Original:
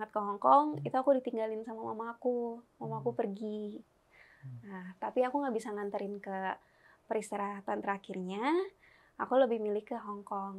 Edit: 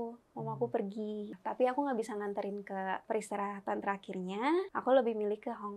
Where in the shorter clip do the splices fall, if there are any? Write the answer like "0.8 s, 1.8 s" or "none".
1.4 s, 3.0 s, 4.7 s